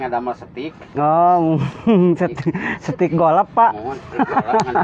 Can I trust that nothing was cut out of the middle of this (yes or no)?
yes